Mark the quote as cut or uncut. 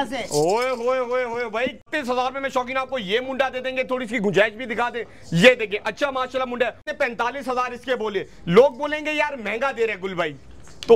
cut